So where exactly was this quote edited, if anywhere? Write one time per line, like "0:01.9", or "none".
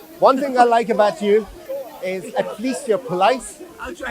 0:01.6